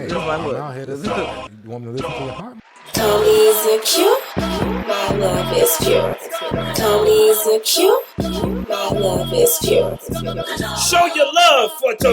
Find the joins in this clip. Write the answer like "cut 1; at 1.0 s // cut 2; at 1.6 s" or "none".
cut 1; at 2.6 s